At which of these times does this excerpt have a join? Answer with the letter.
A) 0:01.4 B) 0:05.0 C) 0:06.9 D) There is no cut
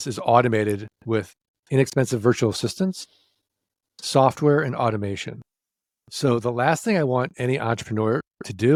D